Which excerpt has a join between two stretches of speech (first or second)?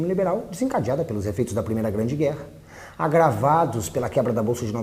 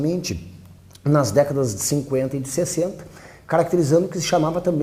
first